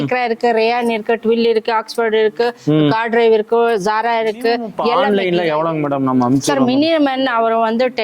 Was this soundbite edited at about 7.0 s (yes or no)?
no